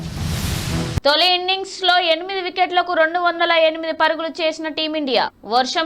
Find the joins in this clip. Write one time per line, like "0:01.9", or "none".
0:00.9